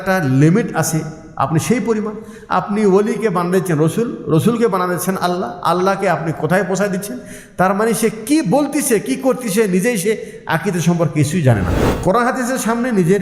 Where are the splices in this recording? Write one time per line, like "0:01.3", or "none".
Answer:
0:11.7